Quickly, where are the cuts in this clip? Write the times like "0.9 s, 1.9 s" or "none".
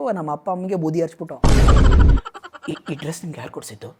2.2 s